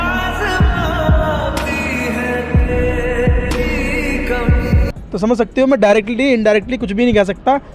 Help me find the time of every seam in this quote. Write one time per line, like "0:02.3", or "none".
0:04.9